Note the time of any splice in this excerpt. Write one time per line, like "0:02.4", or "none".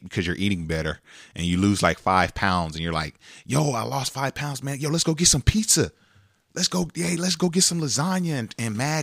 none